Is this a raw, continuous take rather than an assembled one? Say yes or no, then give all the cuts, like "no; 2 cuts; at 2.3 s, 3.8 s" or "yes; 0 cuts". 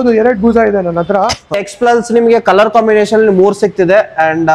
no; 1 cut; at 1.4 s